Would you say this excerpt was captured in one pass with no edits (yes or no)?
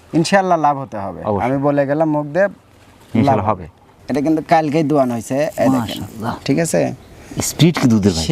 no